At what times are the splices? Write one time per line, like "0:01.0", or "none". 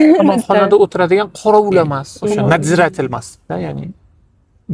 0:02.1